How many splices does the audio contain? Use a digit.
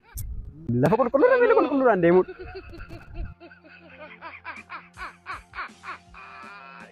0